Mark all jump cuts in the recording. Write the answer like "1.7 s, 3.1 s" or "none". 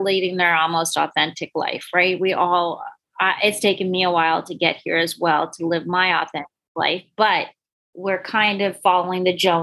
none